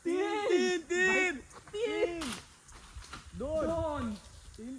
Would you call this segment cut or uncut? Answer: uncut